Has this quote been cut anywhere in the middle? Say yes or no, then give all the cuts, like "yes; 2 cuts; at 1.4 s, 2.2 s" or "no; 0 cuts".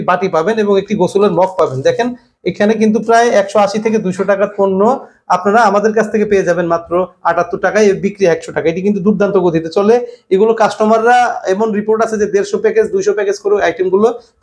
no; 0 cuts